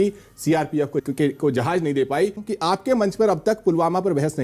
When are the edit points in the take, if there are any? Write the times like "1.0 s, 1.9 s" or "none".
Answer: 1.0 s, 2.4 s